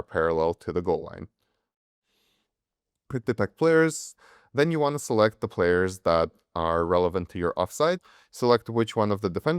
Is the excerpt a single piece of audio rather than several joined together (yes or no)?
no